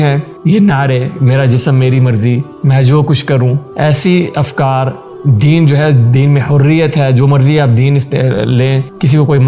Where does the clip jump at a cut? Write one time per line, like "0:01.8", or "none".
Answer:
none